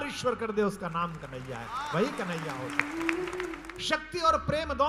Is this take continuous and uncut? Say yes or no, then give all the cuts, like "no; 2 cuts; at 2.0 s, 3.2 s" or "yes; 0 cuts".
no; 1 cut; at 3.7 s